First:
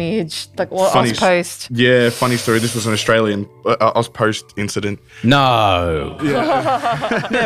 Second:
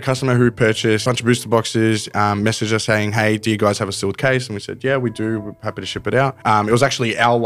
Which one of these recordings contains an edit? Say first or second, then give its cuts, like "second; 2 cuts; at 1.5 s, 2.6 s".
second; 2 cuts; at 1.0 s, 6.4 s